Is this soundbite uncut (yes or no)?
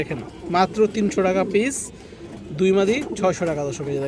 yes